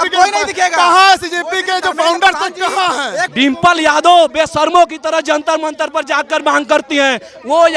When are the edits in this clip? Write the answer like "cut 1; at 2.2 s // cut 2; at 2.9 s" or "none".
cut 1; at 3.3 s